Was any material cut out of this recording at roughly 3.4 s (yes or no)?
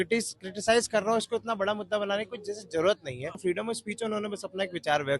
yes